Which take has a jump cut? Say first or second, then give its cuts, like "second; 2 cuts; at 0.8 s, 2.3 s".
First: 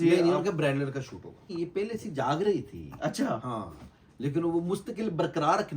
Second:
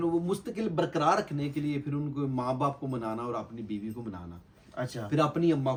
first; 1 cut; at 1.4 s